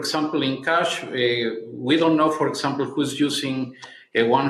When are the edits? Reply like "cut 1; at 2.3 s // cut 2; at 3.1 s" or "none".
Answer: none